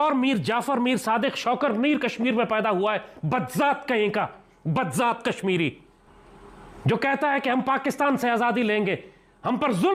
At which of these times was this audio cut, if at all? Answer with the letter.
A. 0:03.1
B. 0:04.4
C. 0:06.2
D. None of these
D